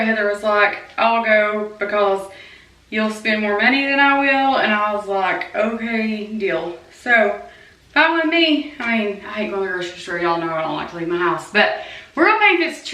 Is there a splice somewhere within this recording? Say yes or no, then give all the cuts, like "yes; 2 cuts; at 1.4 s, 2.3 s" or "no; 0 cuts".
no; 0 cuts